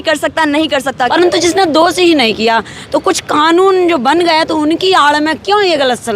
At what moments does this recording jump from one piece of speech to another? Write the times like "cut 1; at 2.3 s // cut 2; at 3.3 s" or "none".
cut 1; at 1.1 s